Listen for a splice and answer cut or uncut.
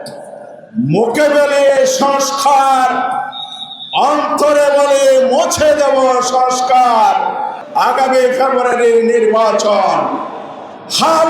cut